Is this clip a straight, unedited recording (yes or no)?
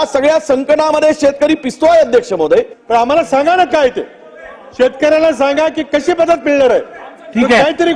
no